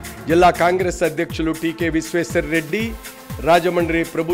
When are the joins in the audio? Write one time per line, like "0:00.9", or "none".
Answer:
none